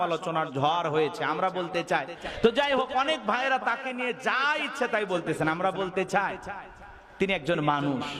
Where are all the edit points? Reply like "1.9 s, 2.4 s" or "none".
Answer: 2.2 s